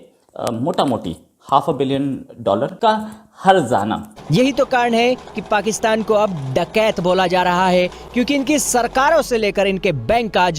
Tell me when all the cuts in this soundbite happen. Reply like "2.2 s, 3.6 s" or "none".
4.1 s